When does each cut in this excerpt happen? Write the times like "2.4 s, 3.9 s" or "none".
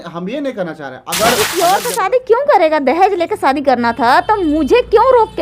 1.4 s

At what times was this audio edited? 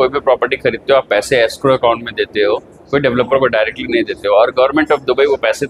none

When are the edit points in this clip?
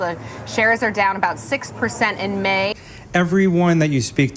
2.7 s

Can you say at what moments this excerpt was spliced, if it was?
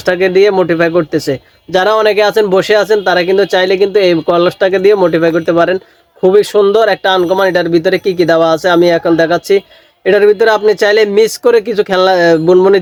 none

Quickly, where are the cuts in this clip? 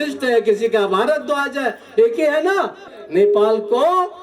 2.9 s

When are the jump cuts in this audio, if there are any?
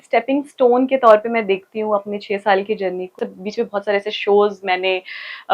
3.1 s

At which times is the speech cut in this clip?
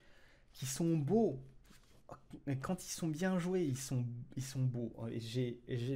none

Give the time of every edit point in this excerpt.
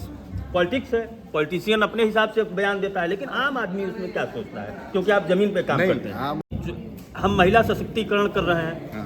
6.4 s

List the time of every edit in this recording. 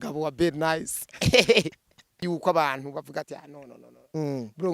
2.2 s

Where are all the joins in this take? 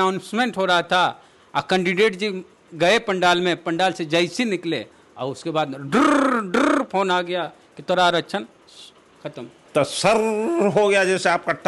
9.6 s

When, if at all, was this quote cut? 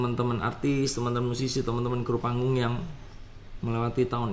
none

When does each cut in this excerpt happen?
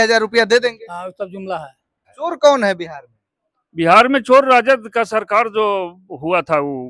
2.1 s

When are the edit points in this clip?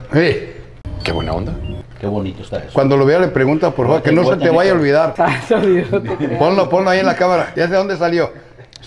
1.9 s, 5.1 s, 7.5 s

